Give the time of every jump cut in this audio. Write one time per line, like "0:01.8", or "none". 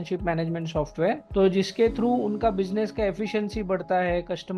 0:01.2